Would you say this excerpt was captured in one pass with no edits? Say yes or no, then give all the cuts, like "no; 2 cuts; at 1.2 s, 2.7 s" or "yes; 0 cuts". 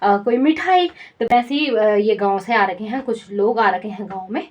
yes; 0 cuts